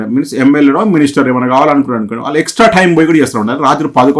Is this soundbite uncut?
yes; 0 cuts

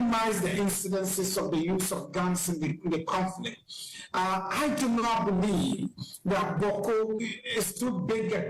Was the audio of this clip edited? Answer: no; 0 cuts

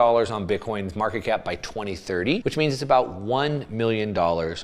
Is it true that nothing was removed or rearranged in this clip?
no; 1 cut; at 2.4 s

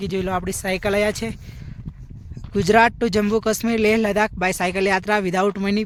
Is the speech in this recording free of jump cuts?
yes; 0 cuts

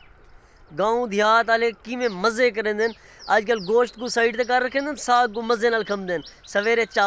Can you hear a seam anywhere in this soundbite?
no; 0 cuts

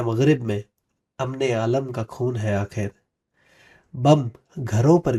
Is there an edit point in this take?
no; 0 cuts

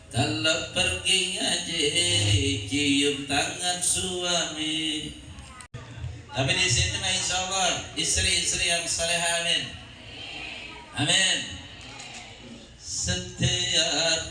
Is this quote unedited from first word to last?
no; 1 cut; at 5.7 s

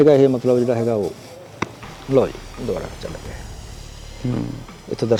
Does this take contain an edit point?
no; 0 cuts

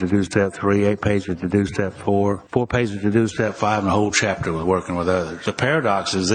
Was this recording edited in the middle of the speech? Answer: yes; 2 cuts; at 2.4 s, 5.4 s

